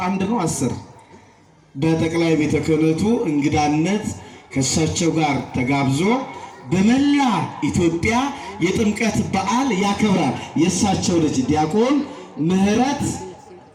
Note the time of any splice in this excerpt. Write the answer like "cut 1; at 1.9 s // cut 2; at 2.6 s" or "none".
none